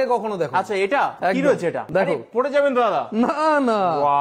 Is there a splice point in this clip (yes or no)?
no